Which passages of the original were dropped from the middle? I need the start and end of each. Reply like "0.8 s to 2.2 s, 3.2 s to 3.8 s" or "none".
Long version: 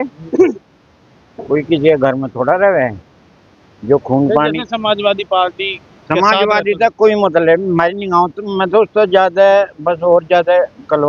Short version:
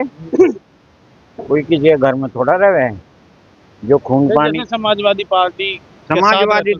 none